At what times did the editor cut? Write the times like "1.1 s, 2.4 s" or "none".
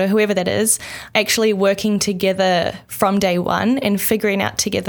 1.0 s